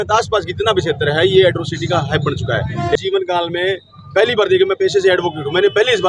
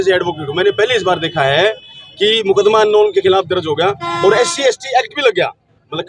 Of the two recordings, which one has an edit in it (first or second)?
first